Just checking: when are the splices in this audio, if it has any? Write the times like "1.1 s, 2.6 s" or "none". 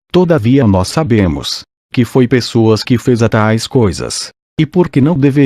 3.5 s